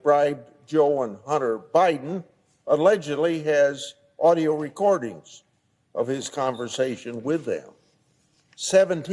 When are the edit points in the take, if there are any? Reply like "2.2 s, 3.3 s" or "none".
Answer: none